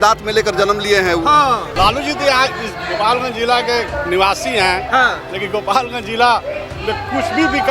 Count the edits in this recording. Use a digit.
1